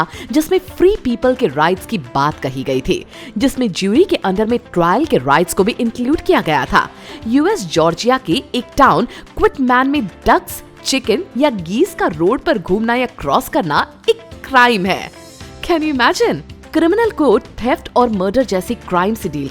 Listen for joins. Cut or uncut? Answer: cut